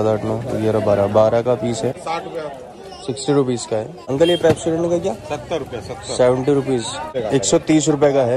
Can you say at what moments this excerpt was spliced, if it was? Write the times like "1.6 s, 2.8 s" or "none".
2.0 s, 4.0 s, 7.1 s